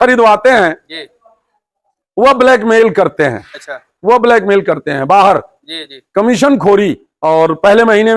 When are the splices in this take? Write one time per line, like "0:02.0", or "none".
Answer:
0:07.1